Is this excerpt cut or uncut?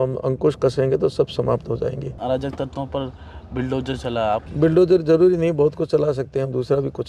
cut